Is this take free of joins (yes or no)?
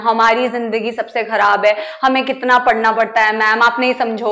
yes